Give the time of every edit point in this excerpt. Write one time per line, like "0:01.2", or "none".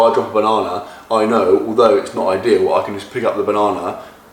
none